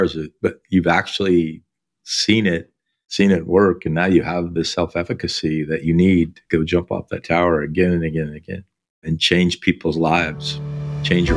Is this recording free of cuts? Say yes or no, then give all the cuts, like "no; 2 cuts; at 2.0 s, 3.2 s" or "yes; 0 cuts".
yes; 0 cuts